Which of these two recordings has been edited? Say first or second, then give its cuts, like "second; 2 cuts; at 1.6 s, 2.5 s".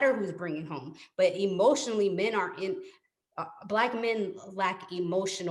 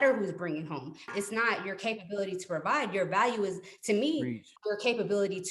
second; 2 cuts; at 1.1 s, 4.6 s